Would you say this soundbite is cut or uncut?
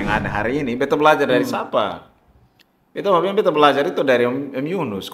uncut